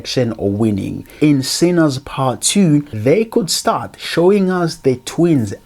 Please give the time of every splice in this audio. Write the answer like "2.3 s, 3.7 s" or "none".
1.1 s, 2.9 s